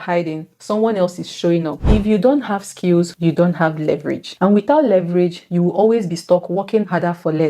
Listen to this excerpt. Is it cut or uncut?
cut